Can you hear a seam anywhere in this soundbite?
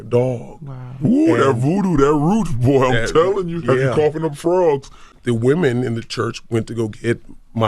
yes; 1 cut; at 5.0 s

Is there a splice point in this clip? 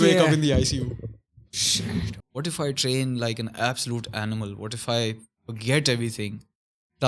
yes; 1 cut; at 2.1 s

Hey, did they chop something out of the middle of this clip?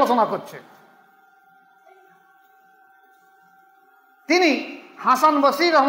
no; 0 cuts

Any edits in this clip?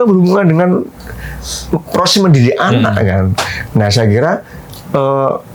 no; 0 cuts

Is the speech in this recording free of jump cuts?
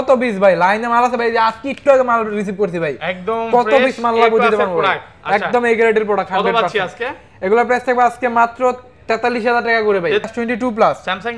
no; 1 cut; at 10.2 s

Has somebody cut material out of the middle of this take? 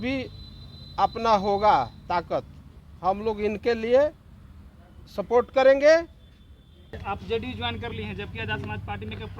yes; 1 cut; at 7.0 s

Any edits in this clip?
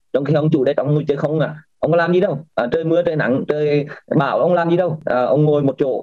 yes; 1 cut; at 5.0 s

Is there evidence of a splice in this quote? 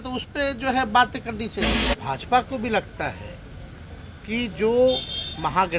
yes; 1 cut; at 1.7 s

